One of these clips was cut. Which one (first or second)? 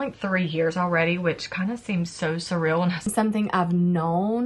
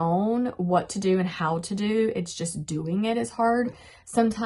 first